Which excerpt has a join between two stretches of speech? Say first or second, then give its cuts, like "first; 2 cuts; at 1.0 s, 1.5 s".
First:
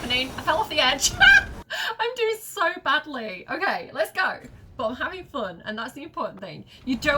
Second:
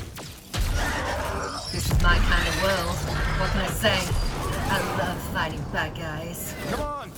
first; 1 cut; at 1.7 s